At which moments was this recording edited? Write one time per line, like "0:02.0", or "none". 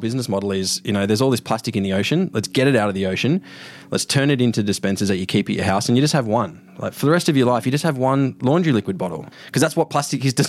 0:09.2